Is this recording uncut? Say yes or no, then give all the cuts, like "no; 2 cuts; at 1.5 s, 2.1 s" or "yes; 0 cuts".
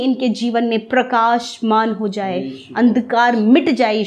yes; 0 cuts